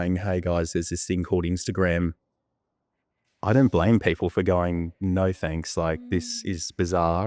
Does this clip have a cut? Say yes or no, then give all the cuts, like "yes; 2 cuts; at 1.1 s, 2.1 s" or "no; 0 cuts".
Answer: no; 0 cuts